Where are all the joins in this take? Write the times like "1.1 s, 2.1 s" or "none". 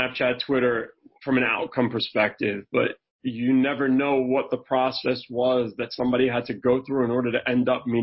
none